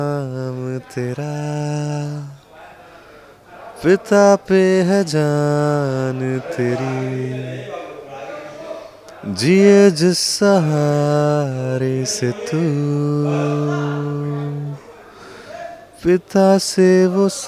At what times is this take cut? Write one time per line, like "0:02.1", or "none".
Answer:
none